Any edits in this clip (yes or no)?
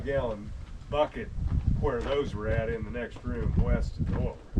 no